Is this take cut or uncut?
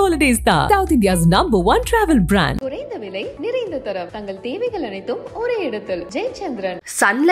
uncut